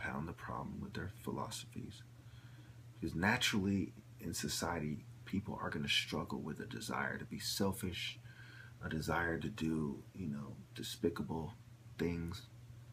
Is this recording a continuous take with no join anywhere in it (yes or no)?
yes